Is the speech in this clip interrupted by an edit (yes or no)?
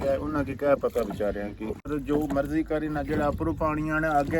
yes